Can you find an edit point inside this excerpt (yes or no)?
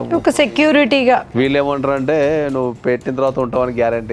yes